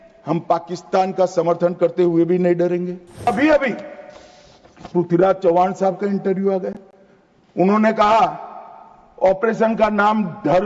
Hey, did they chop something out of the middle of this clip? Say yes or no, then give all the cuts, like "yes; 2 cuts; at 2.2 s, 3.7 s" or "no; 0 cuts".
yes; 1 cut; at 3.3 s